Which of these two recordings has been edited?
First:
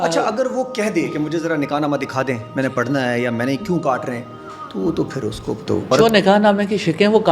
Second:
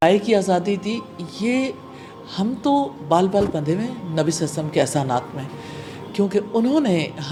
first; 1 cut; at 5.9 s

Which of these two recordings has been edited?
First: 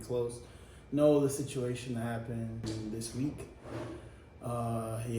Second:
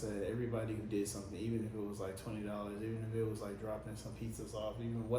first; 1 cut; at 2.6 s

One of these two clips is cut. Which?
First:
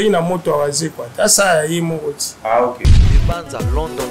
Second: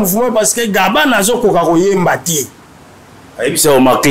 first; 1 cut; at 2.9 s

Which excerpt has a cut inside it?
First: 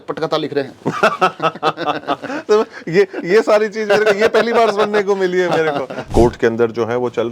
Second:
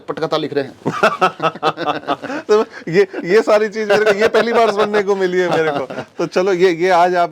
first; 1 cut; at 6.0 s

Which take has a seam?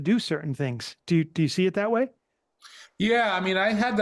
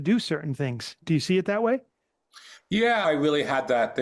second; 2 cuts; at 1.0 s, 3.0 s

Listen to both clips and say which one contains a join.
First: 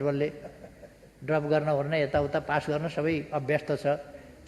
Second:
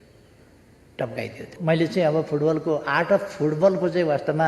second; 1 cut; at 1.5 s

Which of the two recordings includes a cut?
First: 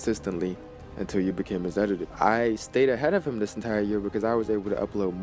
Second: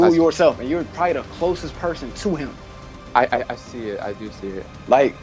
first; 1 cut; at 2.1 s

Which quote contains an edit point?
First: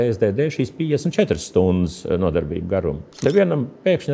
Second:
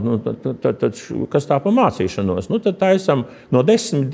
first; 1 cut; at 3.2 s

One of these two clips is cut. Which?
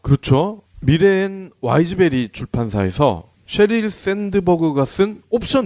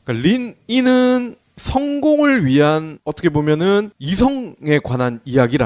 second; 1 cut; at 2.0 s

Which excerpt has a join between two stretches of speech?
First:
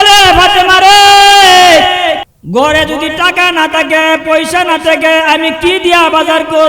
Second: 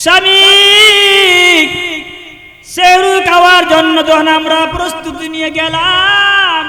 first; 1 cut; at 2.3 s

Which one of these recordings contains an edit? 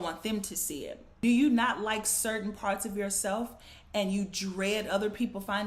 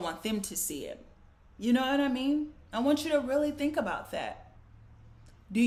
first; 1 cut; at 1.0 s

